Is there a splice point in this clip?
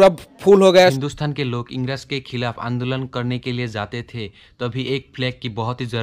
yes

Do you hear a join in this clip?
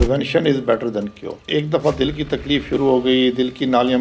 yes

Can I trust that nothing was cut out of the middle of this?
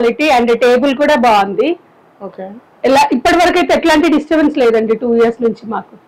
yes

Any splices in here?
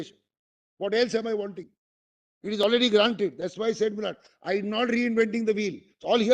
no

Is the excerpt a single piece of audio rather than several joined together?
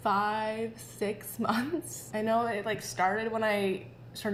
yes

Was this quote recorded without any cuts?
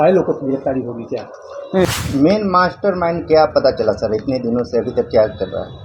no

